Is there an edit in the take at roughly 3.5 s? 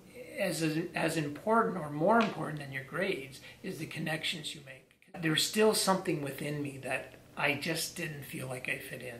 no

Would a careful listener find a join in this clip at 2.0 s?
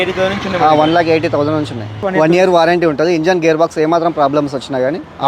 yes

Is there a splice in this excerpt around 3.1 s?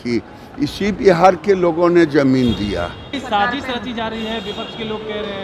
yes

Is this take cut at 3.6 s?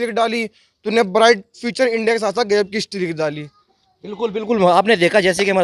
no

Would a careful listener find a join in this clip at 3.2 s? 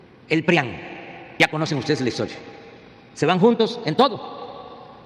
no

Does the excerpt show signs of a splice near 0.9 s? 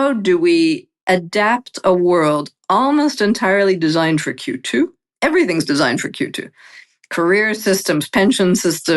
yes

